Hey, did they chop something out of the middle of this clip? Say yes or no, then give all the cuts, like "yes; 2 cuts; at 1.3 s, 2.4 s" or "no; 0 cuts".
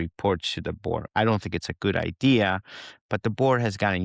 no; 0 cuts